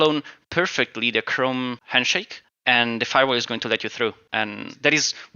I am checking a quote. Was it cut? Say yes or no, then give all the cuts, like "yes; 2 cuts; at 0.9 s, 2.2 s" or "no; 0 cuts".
yes; 2 cuts; at 1.9 s, 4.2 s